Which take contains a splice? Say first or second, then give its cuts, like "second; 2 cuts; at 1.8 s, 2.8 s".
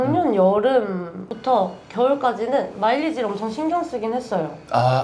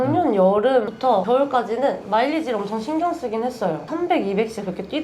second; 2 cuts; at 1.1 s, 3.9 s